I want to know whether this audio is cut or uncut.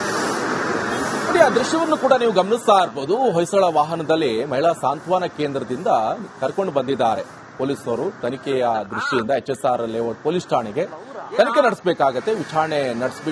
cut